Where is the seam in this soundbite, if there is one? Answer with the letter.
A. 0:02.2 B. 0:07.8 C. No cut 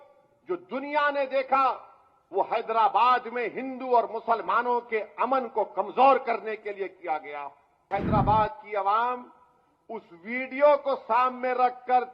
B